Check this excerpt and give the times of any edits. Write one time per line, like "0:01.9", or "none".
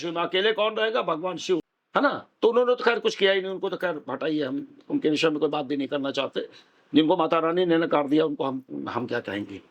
0:01.8